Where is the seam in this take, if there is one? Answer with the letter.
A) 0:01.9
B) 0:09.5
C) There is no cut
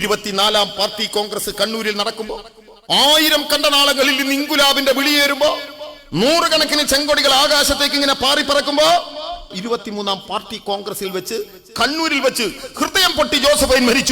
B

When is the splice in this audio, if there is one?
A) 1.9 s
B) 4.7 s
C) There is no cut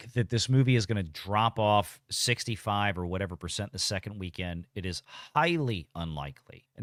C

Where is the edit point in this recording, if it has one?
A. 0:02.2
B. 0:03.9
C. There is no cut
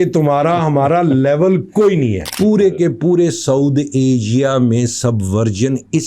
A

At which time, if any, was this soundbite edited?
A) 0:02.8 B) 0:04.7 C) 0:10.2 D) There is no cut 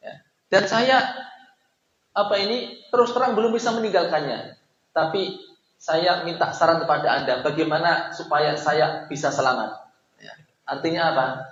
D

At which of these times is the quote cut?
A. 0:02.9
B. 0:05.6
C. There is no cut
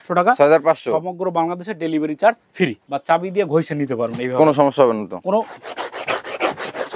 A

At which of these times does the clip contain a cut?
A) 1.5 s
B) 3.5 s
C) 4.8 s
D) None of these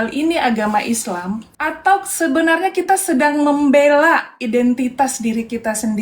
A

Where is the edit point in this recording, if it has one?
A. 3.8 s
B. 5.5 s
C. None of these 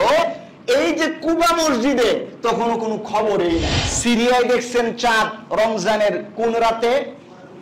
A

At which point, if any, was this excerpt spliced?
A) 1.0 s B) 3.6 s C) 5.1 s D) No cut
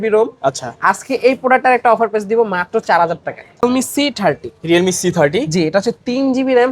B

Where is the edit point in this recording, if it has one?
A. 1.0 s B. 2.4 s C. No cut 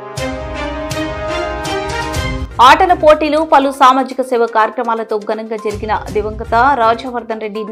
B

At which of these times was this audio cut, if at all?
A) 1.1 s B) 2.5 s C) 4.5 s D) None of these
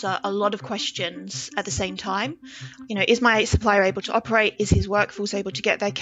C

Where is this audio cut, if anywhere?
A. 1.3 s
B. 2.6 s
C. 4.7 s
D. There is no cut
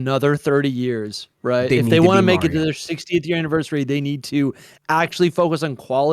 D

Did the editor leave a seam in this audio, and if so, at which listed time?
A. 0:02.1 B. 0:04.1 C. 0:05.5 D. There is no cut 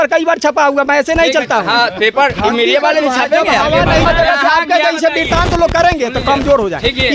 B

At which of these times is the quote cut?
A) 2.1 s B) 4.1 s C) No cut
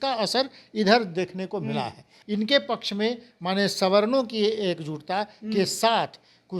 A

